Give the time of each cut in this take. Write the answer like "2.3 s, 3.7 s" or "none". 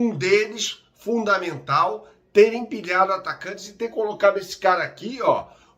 none

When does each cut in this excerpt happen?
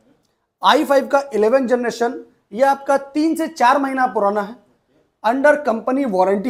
none

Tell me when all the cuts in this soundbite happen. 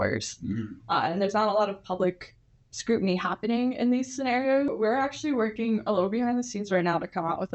4.7 s

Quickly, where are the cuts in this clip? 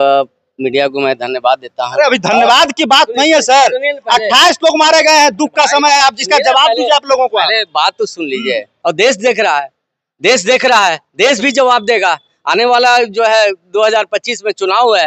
8.7 s

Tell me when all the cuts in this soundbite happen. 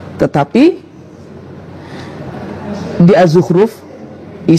none

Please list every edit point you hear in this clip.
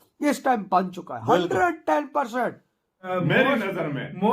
3.1 s

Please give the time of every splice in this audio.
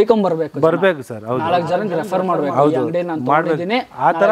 none

